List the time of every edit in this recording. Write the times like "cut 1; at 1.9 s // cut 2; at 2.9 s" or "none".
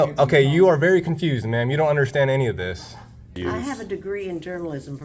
cut 1; at 3.4 s